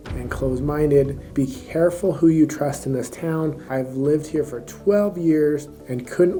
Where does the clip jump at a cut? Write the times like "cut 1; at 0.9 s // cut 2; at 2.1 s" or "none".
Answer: none